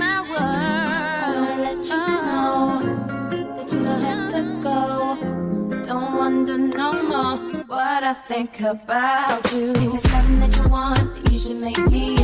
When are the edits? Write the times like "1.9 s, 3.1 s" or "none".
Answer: none